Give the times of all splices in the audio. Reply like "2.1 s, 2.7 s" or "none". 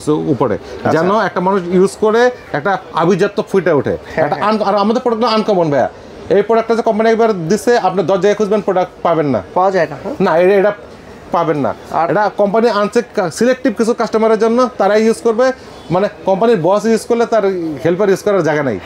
none